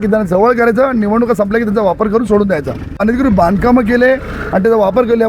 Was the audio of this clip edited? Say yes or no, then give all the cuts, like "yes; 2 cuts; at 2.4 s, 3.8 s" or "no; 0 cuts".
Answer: yes; 1 cut; at 3.0 s